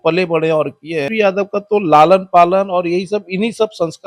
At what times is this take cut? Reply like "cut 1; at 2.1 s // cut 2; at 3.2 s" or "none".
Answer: cut 1; at 1.1 s